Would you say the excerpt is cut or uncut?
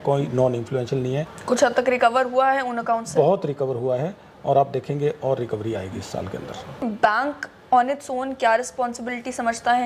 cut